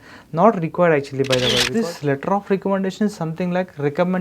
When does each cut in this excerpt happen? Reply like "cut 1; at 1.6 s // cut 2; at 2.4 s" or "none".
cut 1; at 1.7 s